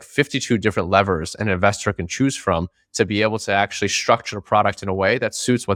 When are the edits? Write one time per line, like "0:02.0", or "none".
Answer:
none